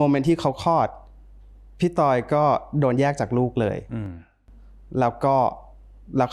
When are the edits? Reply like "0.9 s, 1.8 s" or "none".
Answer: none